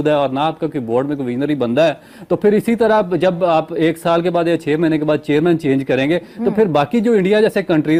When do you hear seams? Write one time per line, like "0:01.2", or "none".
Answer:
none